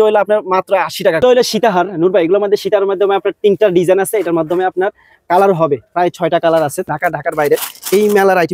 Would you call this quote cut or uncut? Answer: cut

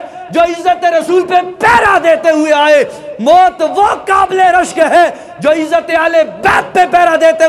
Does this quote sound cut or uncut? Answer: uncut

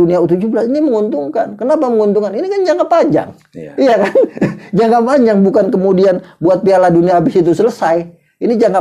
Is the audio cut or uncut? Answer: uncut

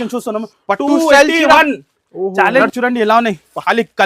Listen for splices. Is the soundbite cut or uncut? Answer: cut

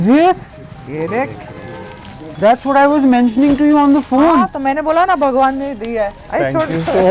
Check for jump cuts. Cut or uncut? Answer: cut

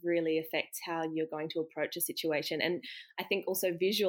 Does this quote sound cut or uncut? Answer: uncut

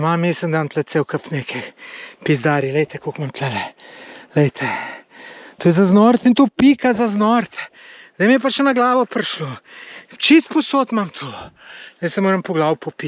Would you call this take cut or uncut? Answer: uncut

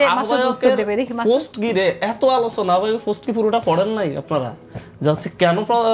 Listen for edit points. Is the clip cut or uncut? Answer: uncut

